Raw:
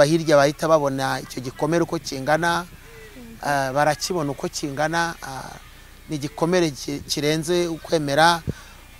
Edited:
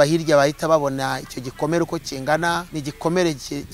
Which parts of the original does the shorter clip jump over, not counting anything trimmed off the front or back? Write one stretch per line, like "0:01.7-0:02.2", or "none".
0:02.7-0:06.1